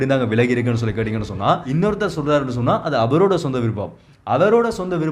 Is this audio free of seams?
no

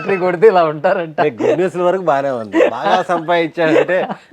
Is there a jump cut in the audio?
no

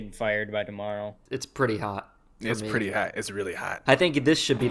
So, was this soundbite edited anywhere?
yes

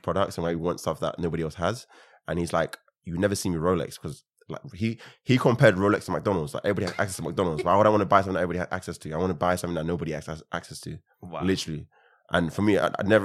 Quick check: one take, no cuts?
yes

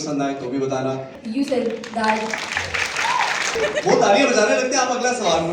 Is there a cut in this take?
yes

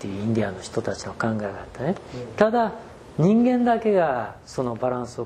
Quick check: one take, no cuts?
yes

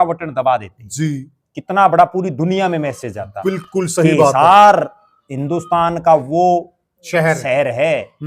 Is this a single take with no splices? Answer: yes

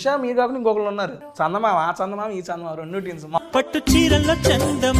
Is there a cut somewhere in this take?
yes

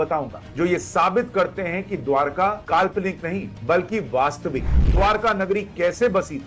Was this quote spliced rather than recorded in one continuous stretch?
no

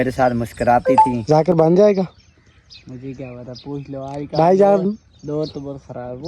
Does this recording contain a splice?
yes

